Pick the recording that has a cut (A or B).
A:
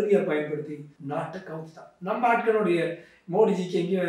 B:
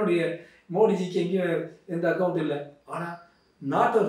A